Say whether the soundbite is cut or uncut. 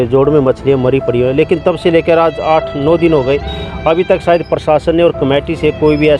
uncut